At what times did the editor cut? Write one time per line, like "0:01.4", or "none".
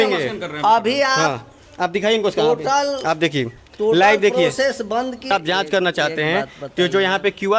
0:05.2

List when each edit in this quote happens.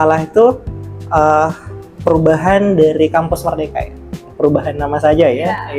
0:04.3

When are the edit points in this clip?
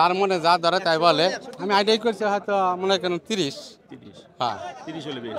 0:01.5

